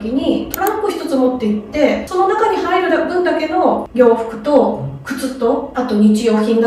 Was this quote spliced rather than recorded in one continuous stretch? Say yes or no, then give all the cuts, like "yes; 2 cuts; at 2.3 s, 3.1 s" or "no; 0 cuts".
no; 0 cuts